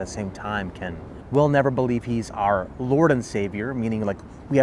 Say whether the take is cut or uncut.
cut